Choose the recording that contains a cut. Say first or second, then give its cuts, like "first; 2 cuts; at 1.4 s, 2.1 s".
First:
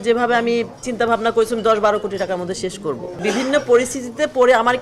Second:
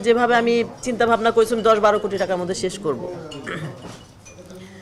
first; 1 cut; at 3.2 s